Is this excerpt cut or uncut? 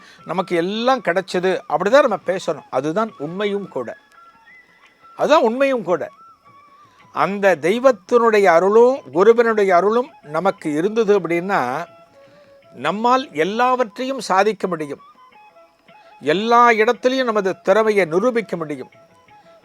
uncut